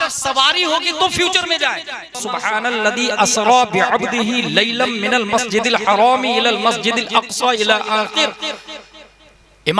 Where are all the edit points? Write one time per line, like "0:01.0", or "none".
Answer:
0:02.3